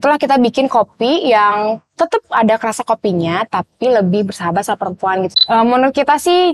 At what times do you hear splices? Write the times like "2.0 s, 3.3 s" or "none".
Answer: 5.4 s